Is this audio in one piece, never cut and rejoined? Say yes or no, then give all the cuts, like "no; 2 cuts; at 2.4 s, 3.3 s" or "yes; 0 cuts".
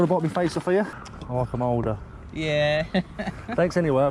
no; 1 cut; at 0.9 s